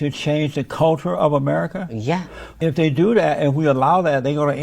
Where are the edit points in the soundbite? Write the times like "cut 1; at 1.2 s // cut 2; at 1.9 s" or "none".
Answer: cut 1; at 2.5 s